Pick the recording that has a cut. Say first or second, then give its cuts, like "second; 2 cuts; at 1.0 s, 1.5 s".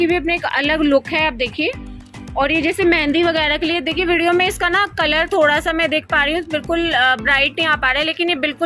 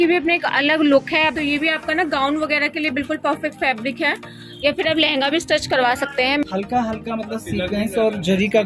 second; 2 cuts; at 1.3 s, 6.5 s